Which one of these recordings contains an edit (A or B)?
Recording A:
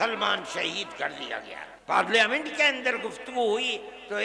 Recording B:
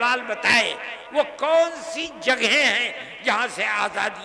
A